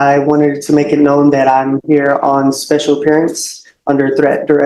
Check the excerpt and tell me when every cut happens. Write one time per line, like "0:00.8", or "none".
none